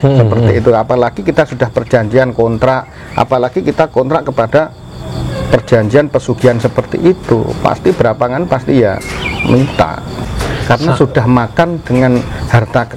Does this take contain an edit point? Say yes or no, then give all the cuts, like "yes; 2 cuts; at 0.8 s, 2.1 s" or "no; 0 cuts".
yes; 1 cut; at 10.2 s